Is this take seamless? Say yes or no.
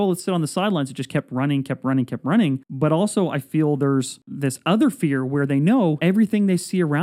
no